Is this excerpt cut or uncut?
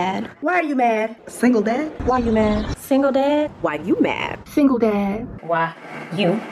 uncut